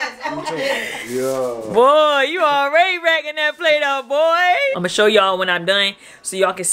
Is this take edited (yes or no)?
yes